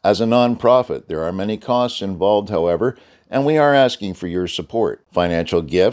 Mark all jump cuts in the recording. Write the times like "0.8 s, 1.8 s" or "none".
none